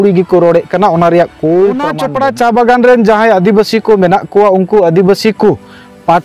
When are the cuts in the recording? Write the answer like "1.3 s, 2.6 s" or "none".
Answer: 2.0 s